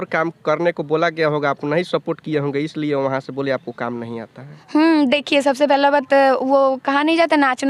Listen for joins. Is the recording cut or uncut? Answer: uncut